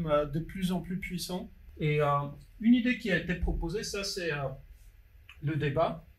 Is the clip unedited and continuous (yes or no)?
no